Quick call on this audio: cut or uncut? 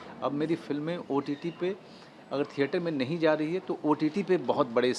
uncut